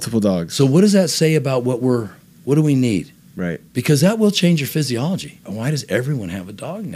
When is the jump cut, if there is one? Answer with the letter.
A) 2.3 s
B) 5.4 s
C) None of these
B